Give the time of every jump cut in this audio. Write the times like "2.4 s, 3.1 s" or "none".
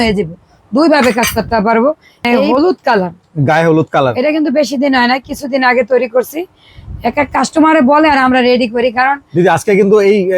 2.2 s